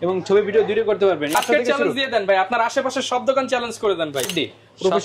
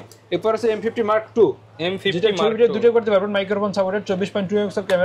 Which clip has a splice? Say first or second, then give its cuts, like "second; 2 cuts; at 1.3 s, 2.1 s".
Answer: first; 2 cuts; at 1.3 s, 4.3 s